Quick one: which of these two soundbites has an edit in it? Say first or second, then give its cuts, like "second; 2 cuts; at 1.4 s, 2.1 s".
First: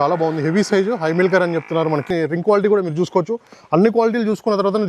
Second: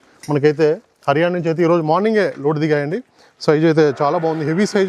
first; 1 cut; at 2.1 s